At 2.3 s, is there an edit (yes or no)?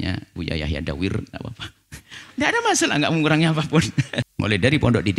no